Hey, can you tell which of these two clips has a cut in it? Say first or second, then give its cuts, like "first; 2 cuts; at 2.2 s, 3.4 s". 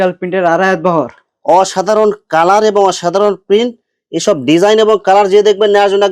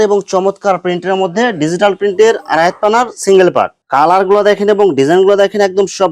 second; 1 cut; at 3.8 s